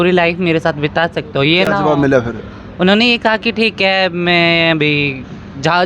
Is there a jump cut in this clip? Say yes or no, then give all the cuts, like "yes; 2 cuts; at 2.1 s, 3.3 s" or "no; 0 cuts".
no; 0 cuts